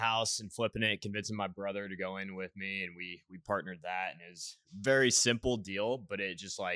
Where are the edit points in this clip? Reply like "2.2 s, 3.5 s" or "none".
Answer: none